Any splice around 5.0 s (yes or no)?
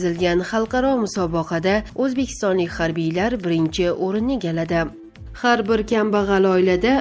yes